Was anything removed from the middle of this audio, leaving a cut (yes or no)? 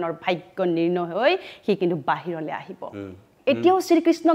yes